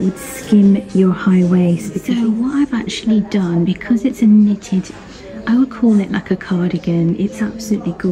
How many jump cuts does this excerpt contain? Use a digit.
1